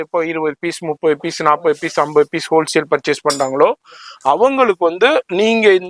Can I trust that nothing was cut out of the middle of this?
yes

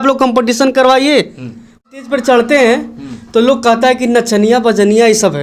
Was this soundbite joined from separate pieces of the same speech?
yes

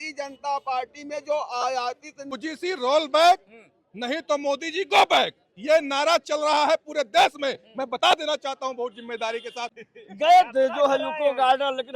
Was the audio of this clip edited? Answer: yes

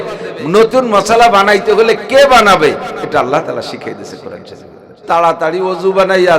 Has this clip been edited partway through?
yes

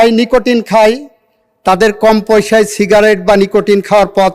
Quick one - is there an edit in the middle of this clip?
no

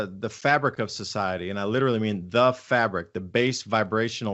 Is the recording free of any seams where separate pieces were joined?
yes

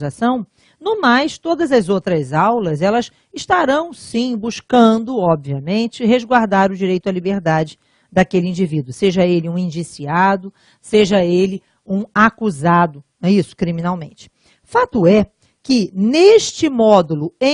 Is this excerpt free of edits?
no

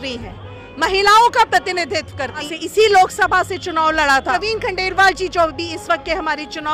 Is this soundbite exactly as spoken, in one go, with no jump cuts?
no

